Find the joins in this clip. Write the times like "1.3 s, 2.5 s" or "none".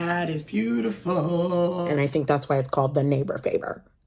1.8 s